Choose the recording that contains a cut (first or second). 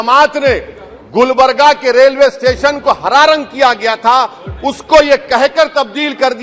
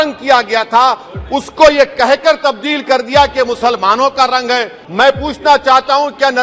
second